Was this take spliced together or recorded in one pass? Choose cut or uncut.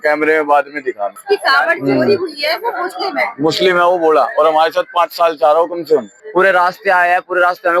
cut